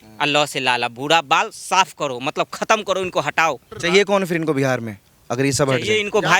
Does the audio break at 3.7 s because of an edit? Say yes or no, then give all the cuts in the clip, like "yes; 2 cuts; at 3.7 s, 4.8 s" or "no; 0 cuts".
yes; 1 cut; at 3.7 s